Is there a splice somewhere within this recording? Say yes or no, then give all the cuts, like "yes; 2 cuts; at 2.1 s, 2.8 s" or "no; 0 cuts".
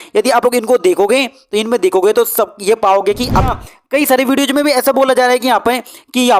yes; 1 cut; at 3.5 s